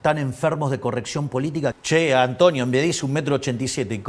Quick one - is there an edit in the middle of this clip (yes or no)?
yes